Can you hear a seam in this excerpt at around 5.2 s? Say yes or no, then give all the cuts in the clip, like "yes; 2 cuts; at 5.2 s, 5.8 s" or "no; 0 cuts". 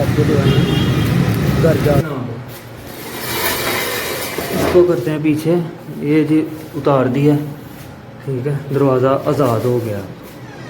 no; 1 cut; at 2.0 s